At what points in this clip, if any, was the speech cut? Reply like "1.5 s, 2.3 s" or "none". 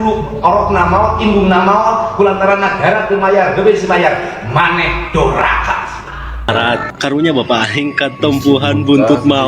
6.5 s